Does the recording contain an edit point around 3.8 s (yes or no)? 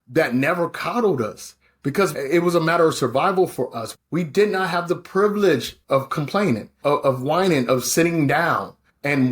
yes